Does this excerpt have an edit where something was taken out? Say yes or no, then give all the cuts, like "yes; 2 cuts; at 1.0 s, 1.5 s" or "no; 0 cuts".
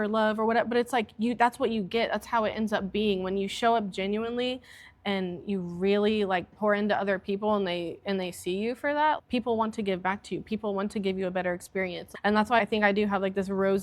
yes; 3 cuts; at 6.5 s, 9.2 s, 12.4 s